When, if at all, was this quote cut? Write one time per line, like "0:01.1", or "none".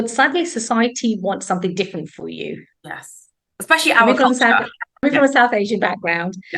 0:05.0